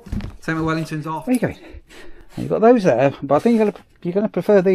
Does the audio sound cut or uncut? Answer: cut